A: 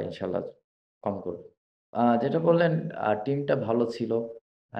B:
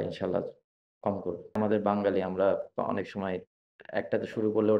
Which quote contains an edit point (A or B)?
B